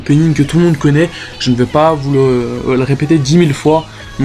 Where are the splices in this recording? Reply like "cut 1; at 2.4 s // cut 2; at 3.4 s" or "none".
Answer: none